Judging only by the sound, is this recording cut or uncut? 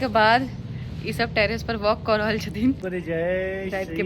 cut